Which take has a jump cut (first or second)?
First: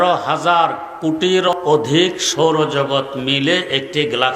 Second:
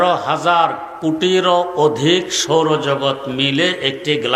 first